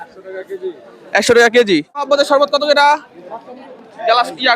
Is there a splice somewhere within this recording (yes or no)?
yes